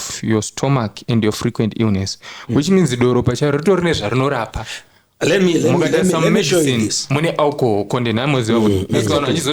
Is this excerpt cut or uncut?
uncut